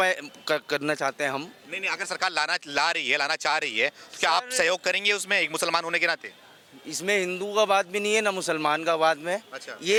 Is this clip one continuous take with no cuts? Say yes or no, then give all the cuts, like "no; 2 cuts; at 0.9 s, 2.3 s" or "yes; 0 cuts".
yes; 0 cuts